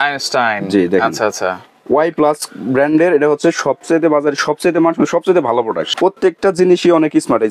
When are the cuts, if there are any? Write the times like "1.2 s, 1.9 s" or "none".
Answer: 5.9 s